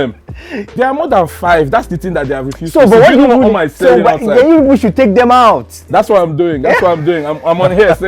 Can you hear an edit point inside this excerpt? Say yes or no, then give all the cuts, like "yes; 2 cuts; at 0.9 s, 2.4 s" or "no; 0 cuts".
no; 0 cuts